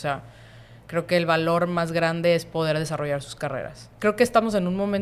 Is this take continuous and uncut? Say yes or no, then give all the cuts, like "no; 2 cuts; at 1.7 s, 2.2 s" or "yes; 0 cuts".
no; 1 cut; at 3.8 s